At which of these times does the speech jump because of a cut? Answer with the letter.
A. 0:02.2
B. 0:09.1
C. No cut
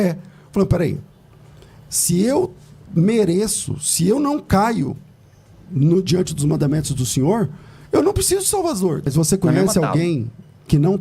B